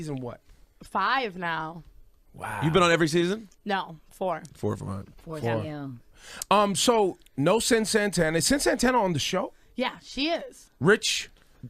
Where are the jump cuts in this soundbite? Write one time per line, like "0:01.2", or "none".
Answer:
0:04.3